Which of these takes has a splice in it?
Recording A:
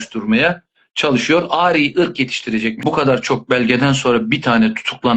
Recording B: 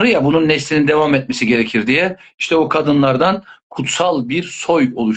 A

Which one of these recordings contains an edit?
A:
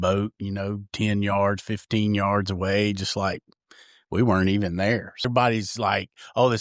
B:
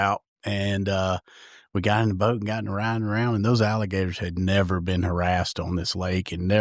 A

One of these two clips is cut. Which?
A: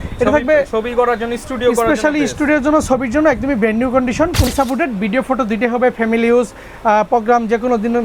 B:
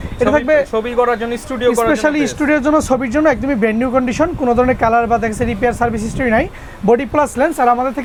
A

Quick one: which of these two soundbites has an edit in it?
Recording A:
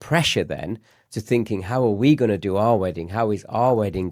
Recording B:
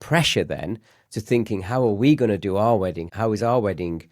B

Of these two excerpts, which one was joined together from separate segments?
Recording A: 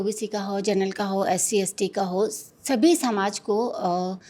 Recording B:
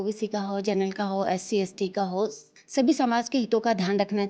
B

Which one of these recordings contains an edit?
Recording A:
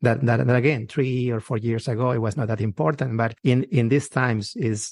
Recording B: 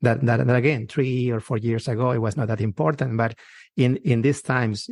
A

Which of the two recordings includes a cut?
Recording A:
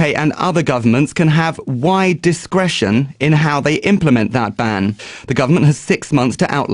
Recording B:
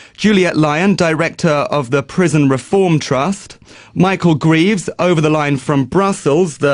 B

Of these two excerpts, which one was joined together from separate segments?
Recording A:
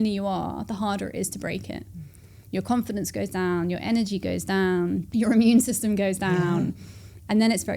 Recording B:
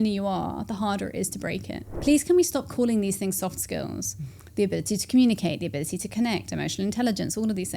B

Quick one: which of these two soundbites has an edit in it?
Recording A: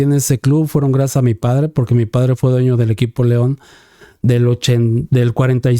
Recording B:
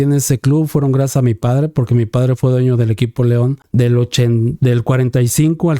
B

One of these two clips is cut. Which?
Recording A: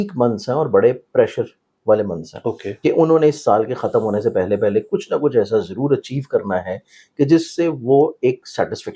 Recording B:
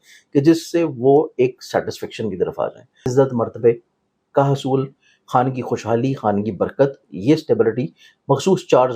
B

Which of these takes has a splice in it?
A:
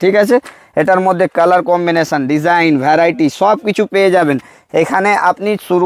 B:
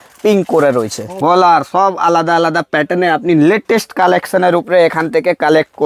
B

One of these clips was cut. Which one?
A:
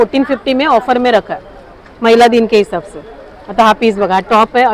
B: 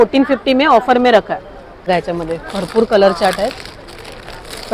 B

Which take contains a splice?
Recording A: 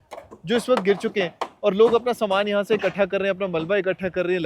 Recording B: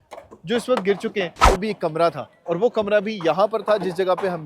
B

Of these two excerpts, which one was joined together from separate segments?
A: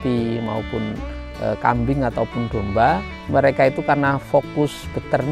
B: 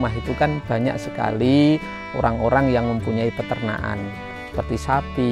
A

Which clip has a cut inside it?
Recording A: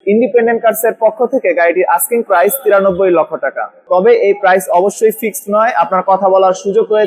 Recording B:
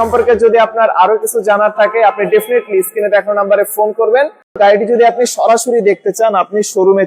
B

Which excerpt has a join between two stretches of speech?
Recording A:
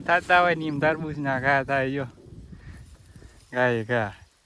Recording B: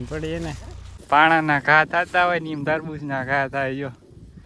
B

